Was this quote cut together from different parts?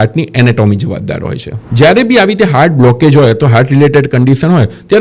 yes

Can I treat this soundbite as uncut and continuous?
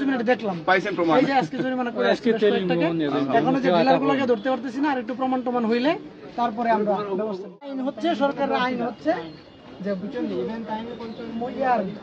no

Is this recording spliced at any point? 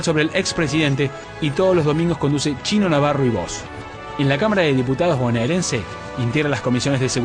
no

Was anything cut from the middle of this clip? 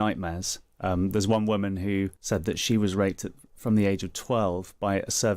yes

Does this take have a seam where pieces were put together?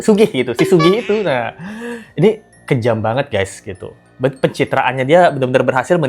no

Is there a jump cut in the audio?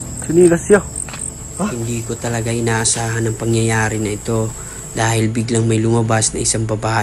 no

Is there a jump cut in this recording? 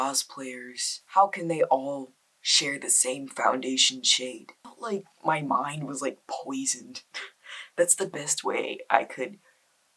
yes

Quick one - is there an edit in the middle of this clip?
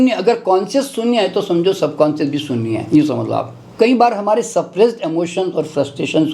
yes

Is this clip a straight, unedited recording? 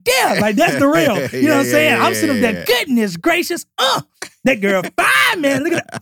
yes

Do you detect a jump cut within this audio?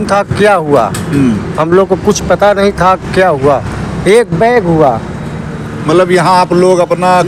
no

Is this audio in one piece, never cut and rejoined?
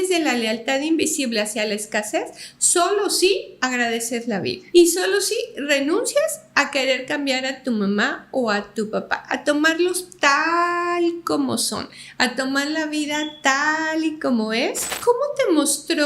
no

